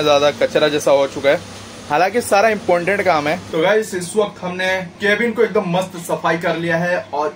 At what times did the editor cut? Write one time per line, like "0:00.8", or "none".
0:03.4
0:04.9